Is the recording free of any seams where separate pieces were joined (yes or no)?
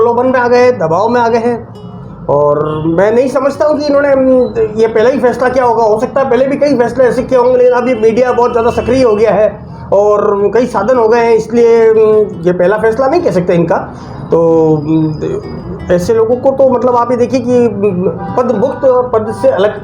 yes